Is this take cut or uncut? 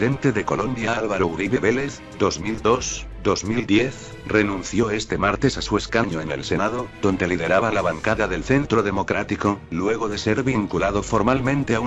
uncut